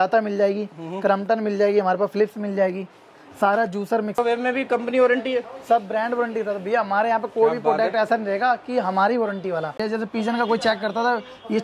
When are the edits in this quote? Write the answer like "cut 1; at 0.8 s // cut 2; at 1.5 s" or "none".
cut 1; at 4.2 s // cut 2; at 9.8 s